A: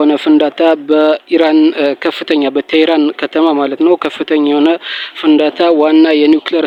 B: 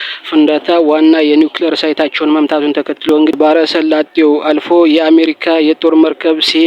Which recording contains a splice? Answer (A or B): B